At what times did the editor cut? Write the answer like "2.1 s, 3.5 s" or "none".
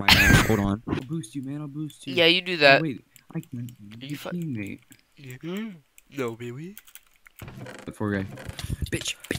1.0 s